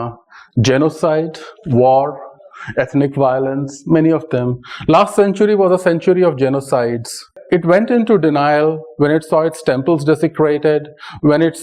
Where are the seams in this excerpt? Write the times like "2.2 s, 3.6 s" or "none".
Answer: 7.4 s